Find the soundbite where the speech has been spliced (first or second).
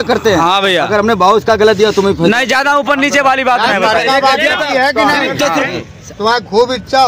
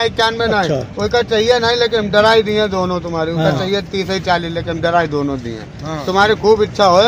first